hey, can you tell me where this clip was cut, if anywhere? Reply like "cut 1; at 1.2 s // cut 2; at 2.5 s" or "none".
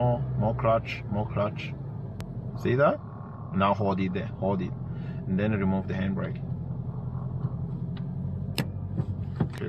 none